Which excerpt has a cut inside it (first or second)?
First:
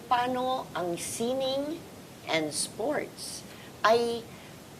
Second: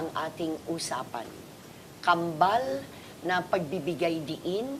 first